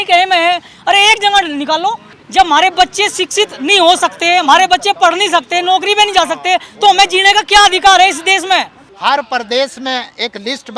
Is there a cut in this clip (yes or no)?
yes